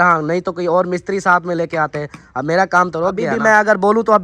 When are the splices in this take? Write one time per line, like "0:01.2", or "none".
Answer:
0:03.3